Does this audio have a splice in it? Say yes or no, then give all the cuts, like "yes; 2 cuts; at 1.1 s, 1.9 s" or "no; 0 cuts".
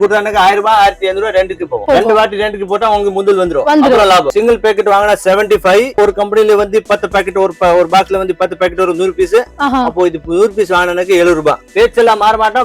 yes; 4 cuts; at 1.8 s, 4.3 s, 6.0 s, 11.6 s